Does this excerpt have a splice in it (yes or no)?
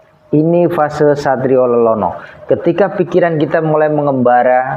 no